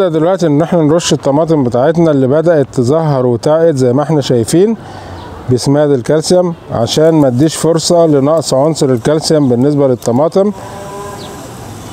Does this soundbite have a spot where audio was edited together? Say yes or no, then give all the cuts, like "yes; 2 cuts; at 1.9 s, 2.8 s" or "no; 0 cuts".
no; 0 cuts